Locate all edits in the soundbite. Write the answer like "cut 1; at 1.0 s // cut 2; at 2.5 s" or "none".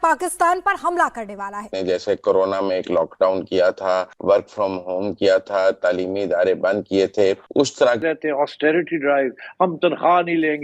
cut 1; at 1.7 s // cut 2; at 8.0 s